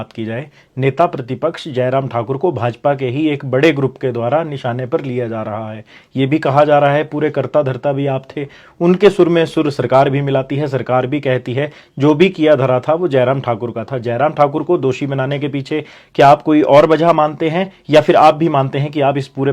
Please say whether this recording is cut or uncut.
uncut